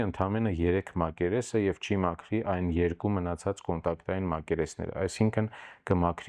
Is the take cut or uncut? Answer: uncut